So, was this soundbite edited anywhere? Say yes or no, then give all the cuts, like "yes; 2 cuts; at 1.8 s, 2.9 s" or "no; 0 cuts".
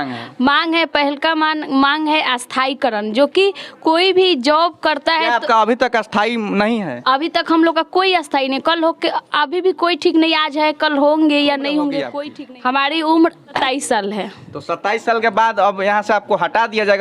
yes; 2 cuts; at 12.1 s, 13.6 s